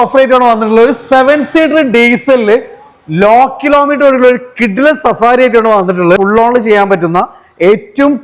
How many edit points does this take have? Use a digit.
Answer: 1